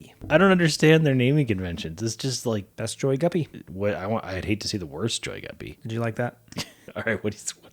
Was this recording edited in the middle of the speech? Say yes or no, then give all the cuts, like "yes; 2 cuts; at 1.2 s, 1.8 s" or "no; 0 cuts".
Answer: yes; 4 cuts; at 2.7 s, 3.6 s, 5.7 s, 6.8 s